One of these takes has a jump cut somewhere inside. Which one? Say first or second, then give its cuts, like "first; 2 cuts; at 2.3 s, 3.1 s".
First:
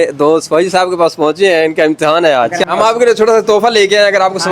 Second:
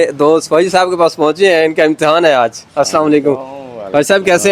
first; 1 cut; at 2.5 s